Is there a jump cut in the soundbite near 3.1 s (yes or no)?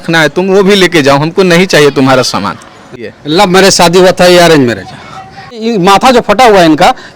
yes